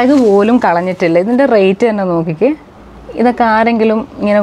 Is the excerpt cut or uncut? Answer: uncut